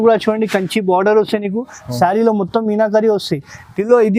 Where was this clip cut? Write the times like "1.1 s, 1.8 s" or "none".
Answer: none